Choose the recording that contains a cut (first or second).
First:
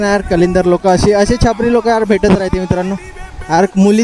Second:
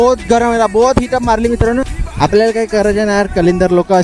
second